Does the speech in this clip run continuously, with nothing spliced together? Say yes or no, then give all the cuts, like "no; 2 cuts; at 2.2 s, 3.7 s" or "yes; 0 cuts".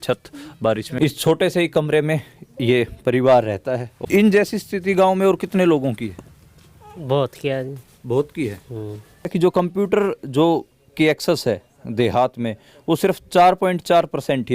no; 3 cuts; at 0.9 s, 3.9 s, 9.3 s